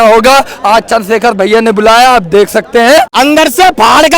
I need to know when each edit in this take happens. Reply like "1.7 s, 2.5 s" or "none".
3.1 s